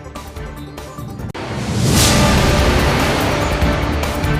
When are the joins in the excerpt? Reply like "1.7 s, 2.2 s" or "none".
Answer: 1.3 s